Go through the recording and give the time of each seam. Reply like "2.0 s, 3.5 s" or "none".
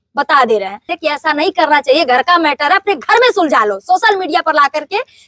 0.9 s